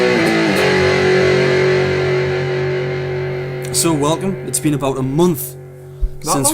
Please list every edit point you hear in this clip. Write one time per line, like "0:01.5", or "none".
0:03.7